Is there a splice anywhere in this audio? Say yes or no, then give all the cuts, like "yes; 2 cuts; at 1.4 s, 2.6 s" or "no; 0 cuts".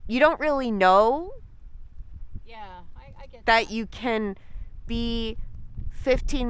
no; 0 cuts